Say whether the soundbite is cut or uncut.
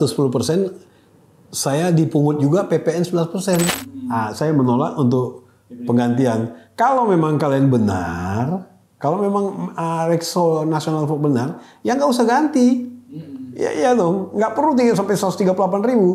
cut